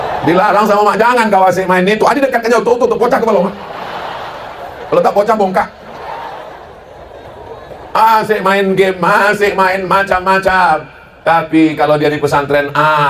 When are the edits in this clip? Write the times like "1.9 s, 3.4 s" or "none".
none